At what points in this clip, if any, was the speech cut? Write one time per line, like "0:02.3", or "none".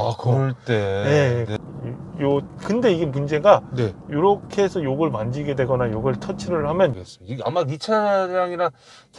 0:01.5
0:06.9

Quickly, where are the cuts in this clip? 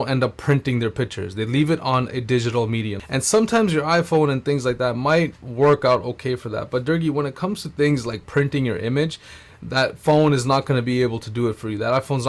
0:03.0

